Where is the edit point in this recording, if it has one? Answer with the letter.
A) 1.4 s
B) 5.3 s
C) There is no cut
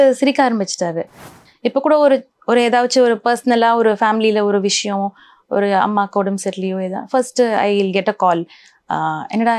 A